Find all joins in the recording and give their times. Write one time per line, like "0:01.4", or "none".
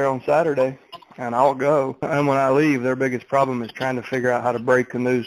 0:02.1